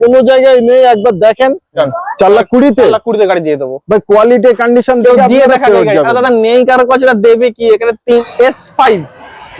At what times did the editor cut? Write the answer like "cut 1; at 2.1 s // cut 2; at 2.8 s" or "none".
cut 1; at 1.8 s // cut 2; at 8.2 s